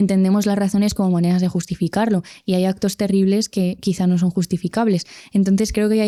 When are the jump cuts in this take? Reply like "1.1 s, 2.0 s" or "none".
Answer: none

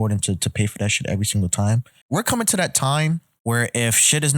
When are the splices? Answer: 1.9 s, 3.3 s

